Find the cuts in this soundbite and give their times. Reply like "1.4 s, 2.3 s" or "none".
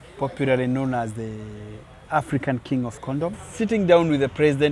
3.4 s